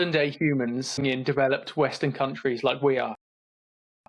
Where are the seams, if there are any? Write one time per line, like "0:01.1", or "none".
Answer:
0:01.0